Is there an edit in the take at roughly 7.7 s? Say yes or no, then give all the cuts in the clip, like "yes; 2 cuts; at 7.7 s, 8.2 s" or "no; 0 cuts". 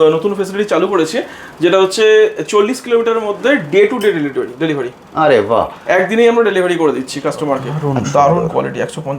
yes; 1 cut; at 7.7 s